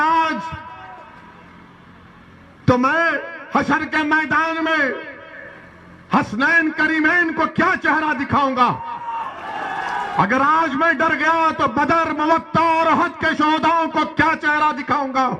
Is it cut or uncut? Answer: uncut